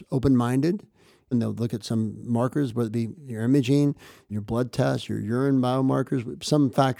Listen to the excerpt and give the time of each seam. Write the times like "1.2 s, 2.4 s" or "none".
1.3 s, 4.3 s